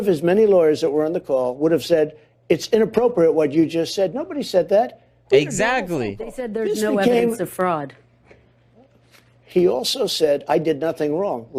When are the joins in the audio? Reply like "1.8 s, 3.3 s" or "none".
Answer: none